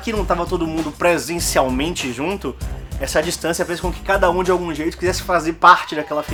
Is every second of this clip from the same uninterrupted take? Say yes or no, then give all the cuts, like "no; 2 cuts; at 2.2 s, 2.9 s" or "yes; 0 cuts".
yes; 0 cuts